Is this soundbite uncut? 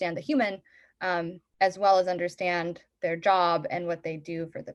yes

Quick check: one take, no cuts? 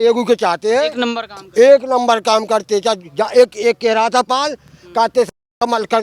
yes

